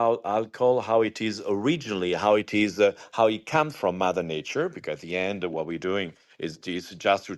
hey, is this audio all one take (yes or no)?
yes